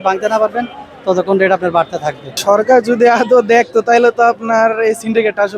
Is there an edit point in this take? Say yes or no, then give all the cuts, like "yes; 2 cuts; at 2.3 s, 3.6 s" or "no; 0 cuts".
yes; 1 cut; at 2.3 s